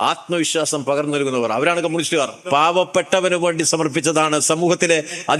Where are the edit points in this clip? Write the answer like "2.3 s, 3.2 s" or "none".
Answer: 2.4 s

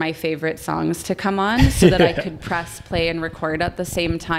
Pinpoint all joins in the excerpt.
none

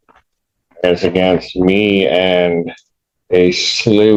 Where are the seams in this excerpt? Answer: none

